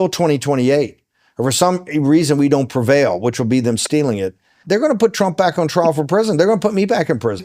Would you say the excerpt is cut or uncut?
cut